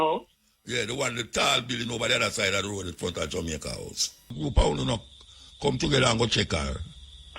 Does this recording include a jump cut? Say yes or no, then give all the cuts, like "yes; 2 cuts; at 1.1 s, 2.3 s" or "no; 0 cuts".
yes; 1 cut; at 4.3 s